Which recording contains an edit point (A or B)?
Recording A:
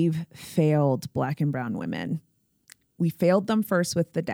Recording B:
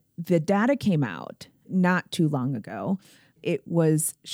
B